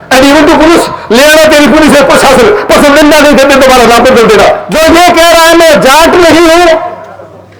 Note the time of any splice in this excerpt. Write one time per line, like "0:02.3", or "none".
0:04.7